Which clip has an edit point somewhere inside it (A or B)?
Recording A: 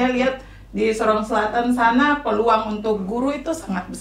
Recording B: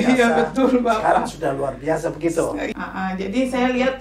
B